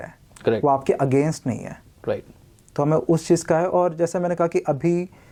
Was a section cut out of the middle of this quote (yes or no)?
no